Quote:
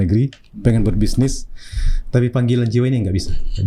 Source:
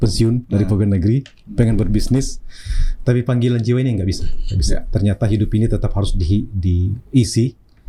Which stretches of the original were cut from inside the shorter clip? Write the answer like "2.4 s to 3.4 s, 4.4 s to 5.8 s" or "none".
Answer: none